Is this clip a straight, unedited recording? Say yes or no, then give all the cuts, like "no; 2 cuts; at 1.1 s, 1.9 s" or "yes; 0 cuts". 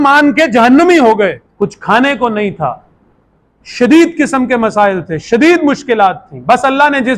no; 1 cut; at 1.4 s